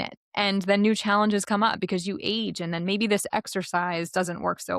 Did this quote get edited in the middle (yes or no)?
no